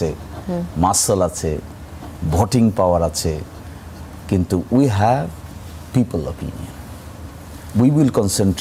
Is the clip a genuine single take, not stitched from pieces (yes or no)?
yes